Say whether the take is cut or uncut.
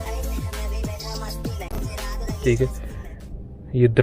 uncut